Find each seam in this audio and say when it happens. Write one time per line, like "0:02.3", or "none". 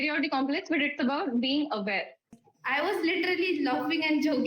0:02.4